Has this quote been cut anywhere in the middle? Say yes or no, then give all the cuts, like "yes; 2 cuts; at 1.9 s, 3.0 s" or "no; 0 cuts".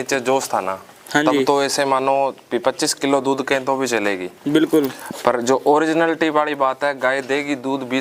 no; 0 cuts